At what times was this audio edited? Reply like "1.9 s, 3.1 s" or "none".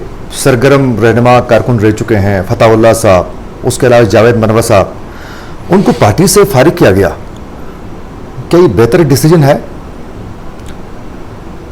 none